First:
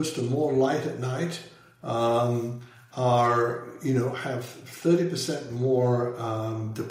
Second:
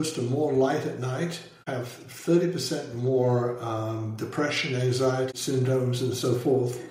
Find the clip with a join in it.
second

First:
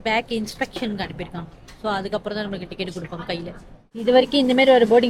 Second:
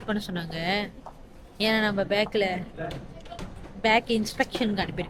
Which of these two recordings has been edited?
first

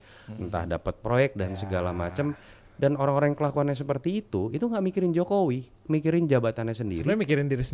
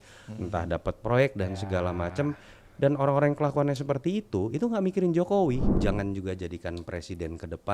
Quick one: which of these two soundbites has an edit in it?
second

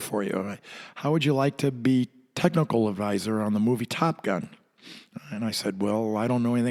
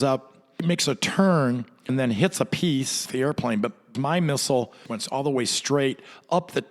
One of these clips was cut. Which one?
second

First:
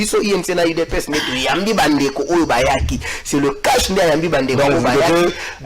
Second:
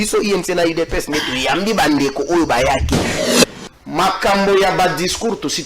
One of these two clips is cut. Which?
second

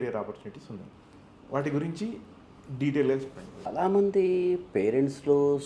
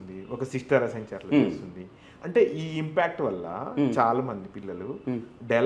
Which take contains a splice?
first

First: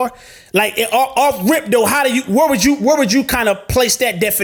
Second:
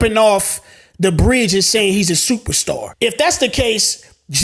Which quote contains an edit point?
second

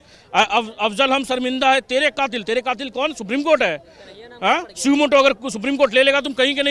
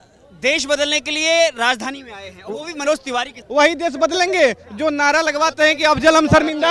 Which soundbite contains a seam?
second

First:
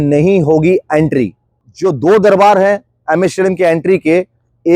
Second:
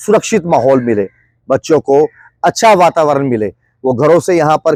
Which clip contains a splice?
first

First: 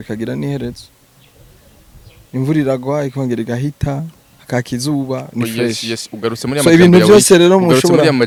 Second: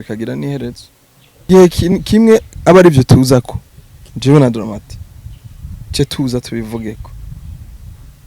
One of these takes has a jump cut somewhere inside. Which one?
second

